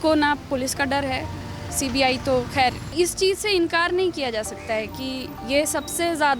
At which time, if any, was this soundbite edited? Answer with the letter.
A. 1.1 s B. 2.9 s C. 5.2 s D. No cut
B